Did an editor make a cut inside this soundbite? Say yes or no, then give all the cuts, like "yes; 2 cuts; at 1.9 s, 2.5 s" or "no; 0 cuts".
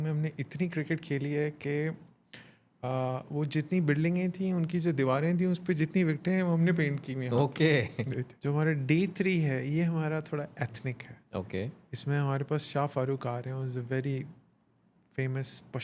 yes; 1 cut; at 8.3 s